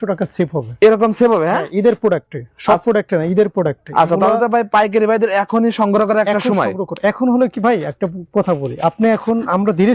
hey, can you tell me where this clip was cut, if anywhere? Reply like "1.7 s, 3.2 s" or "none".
none